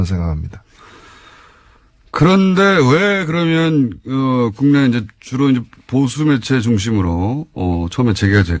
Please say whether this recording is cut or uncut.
cut